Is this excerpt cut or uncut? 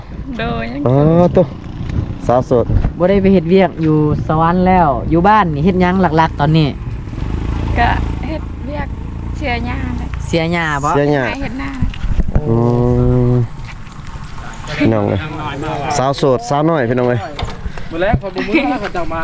uncut